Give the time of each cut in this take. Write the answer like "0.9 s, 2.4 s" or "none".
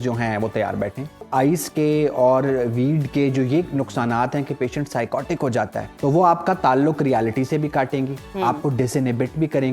1.2 s, 5.9 s